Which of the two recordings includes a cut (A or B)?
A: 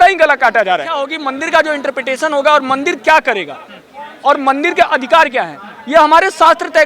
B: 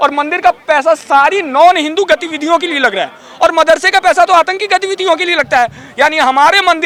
A